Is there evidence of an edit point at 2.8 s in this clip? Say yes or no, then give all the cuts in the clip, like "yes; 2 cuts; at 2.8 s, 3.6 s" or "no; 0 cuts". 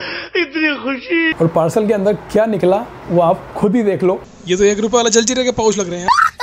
no; 2 cuts; at 1.3 s, 4.2 s